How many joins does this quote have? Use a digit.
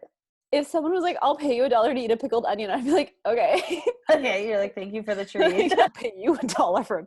1